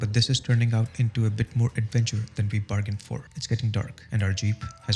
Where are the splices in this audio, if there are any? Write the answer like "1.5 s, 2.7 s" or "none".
3.3 s, 4.0 s